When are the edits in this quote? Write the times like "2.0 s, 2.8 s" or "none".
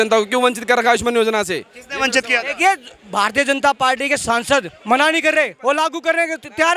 none